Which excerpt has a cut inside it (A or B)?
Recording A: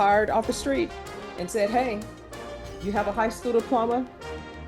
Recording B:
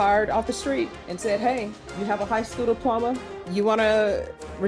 B